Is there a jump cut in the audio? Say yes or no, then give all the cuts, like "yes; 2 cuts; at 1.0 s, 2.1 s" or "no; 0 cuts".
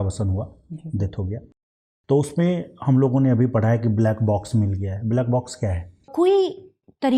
yes; 1 cut; at 6.1 s